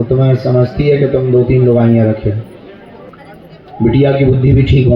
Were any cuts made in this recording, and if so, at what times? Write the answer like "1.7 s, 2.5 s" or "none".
3.0 s